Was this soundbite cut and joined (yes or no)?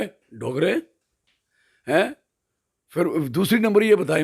no